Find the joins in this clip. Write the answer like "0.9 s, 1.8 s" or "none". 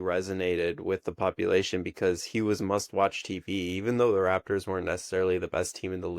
none